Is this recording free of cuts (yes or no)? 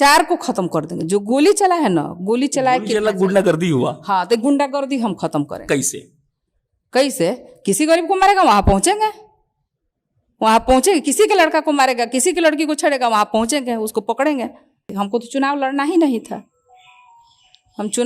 no